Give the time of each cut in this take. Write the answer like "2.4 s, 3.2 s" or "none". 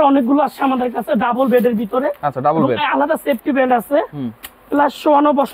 none

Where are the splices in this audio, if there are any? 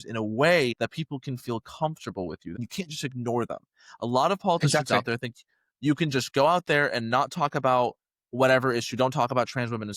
0.8 s, 2.5 s

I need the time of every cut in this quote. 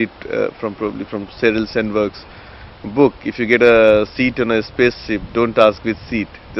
none

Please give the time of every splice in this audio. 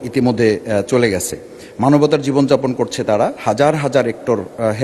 none

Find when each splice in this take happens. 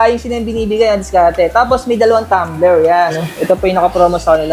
3.2 s

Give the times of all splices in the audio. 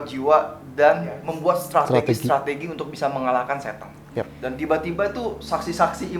1.3 s, 4.3 s

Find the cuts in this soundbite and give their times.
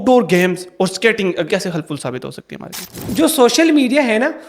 1.5 s, 2.9 s

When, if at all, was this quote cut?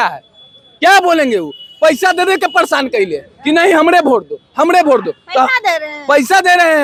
none

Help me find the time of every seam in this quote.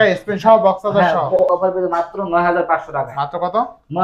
1.4 s

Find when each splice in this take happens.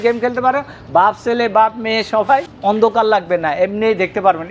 2.5 s

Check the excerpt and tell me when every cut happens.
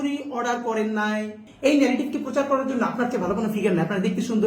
1.4 s

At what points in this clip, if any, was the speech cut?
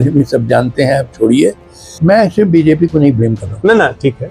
1.9 s

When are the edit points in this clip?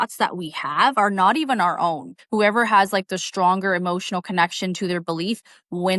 2.2 s

